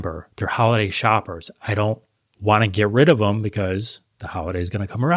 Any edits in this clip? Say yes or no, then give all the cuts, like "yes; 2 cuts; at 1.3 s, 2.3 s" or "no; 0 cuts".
no; 0 cuts